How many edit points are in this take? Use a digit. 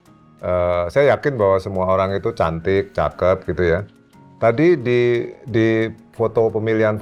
0